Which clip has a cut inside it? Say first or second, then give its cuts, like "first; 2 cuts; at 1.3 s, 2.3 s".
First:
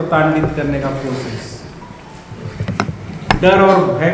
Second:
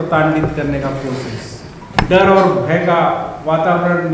second; 1 cut; at 1.8 s